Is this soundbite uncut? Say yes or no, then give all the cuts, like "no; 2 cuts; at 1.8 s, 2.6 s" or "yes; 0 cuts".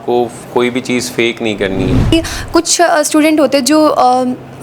no; 1 cut; at 2.1 s